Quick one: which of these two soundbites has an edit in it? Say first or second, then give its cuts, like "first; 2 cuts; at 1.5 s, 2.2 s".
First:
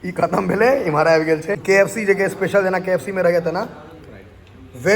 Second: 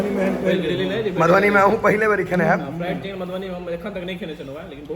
first; 1 cut; at 1.6 s